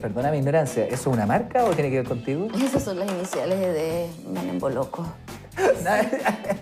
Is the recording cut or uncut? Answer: cut